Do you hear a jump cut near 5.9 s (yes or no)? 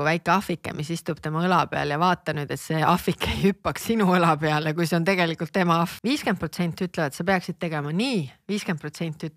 yes